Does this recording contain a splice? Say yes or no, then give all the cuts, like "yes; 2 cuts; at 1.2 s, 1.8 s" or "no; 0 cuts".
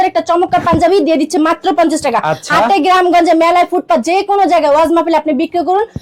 no; 0 cuts